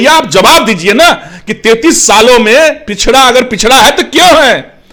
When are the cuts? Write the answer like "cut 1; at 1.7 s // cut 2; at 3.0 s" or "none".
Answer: none